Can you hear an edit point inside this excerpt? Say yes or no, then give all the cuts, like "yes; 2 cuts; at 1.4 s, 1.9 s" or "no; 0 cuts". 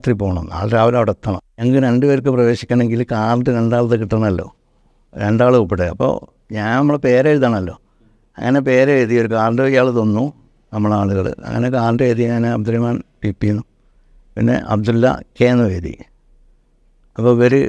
yes; 1 cut; at 1.6 s